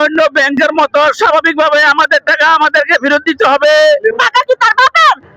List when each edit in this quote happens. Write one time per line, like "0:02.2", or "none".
0:04.1